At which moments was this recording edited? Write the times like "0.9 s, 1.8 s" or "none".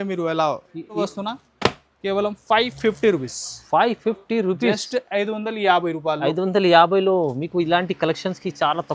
1.0 s